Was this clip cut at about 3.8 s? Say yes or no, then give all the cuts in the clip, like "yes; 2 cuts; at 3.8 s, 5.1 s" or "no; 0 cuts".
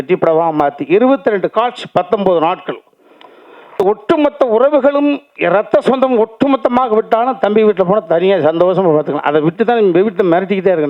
yes; 1 cut; at 3.8 s